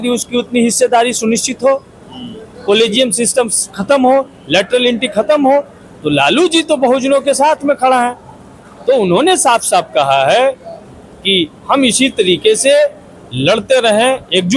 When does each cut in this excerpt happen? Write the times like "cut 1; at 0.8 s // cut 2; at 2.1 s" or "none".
none